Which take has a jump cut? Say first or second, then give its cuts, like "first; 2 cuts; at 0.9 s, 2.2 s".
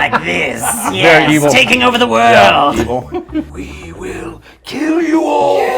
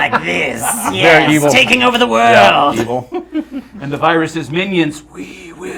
first; 1 cut; at 3.6 s